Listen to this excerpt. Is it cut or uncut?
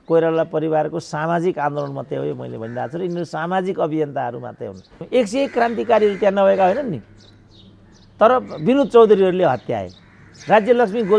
cut